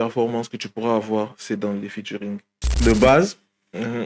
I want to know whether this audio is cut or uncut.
cut